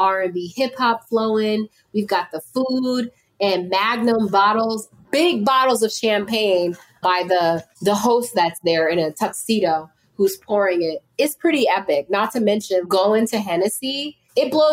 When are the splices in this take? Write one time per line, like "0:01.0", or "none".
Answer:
0:07.0